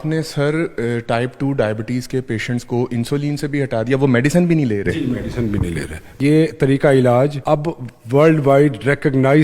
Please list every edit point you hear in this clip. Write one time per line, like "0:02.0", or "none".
0:06.2
0:07.4